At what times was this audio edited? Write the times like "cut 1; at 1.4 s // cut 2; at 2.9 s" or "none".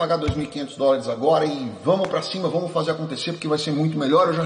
none